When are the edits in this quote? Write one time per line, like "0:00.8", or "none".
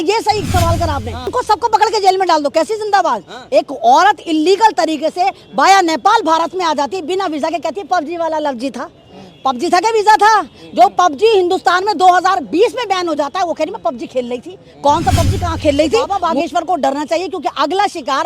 0:01.3
0:16.1